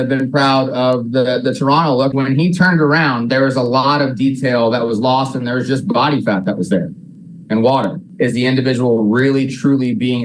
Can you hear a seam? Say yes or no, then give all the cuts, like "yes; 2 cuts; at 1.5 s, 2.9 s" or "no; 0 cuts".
yes; 2 cuts; at 2.1 s, 8.0 s